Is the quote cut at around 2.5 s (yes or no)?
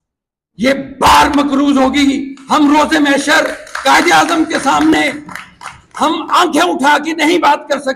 no